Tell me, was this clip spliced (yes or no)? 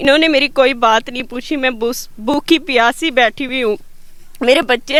no